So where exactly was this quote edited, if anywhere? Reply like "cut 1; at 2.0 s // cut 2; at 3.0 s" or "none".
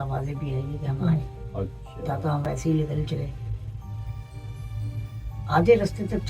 cut 1; at 2.5 s